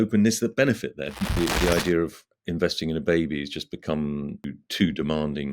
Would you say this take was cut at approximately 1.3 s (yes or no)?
yes